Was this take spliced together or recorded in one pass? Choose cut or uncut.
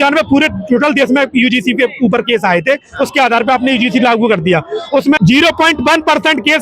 cut